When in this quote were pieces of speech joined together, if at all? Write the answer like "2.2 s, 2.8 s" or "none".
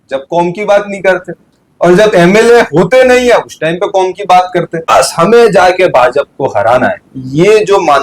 4.9 s